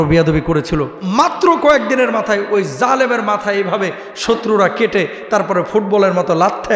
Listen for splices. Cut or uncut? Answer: cut